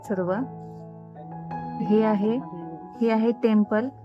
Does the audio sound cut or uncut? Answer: uncut